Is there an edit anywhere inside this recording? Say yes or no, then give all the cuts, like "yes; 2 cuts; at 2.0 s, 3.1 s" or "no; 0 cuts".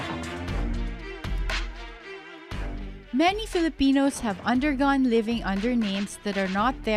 yes; 1 cut; at 2.1 s